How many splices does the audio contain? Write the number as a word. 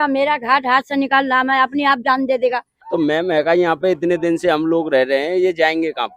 one